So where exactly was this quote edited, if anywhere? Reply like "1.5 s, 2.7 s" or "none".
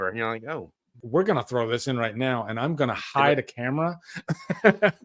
1.0 s